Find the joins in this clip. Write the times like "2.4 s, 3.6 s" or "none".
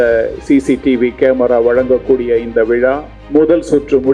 3.1 s